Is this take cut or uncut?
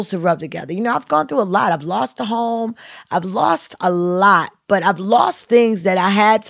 uncut